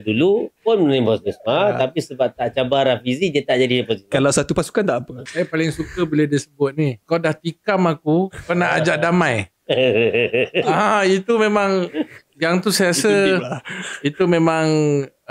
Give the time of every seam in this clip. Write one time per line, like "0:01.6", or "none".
0:05.2
0:07.0